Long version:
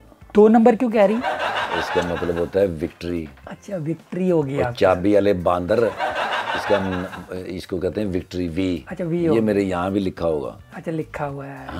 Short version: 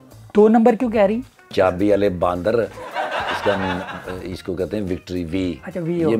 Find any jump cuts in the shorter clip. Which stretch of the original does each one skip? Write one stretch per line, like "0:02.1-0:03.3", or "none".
0:01.4-0:04.6

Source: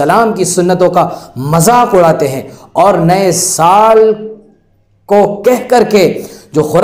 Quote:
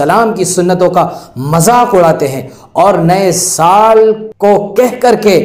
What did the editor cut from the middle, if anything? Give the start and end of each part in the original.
0:04.3-0:05.0

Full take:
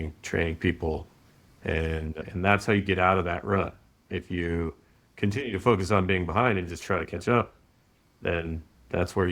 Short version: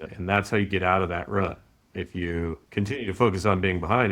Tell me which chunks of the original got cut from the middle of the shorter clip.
0:04.8-0:05.1

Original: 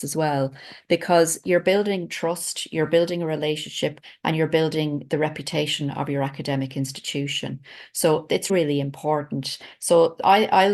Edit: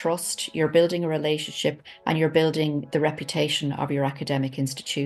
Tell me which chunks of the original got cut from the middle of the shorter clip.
none

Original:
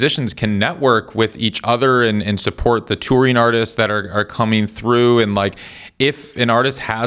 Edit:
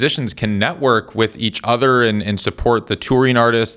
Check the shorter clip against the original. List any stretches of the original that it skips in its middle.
none

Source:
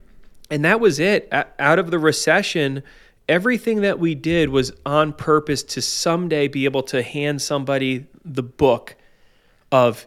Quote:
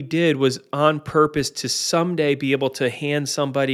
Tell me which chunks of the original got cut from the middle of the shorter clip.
none

